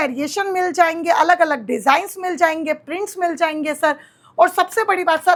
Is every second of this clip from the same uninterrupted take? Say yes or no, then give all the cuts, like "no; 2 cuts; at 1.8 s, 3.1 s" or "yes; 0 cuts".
yes; 0 cuts